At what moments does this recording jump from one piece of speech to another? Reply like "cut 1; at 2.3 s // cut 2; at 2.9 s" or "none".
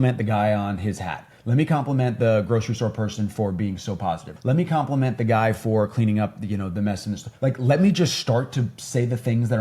cut 1; at 4.3 s // cut 2; at 7.2 s